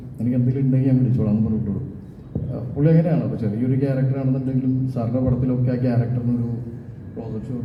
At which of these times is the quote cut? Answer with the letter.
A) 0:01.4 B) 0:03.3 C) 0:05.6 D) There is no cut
D